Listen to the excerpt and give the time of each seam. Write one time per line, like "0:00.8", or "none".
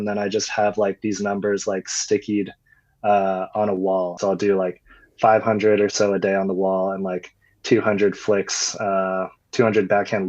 0:04.2